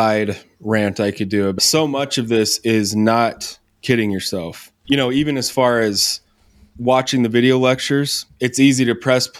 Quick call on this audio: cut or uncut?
cut